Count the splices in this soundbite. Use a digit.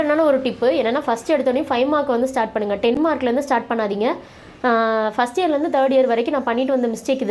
0